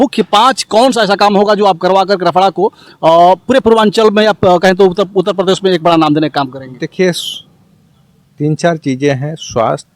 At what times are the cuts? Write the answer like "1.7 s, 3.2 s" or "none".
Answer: none